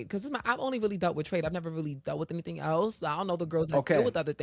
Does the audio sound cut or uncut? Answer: uncut